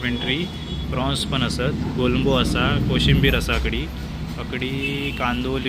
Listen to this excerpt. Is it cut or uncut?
uncut